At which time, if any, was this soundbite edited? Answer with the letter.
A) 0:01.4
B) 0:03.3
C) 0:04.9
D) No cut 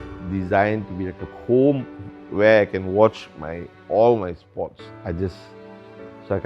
C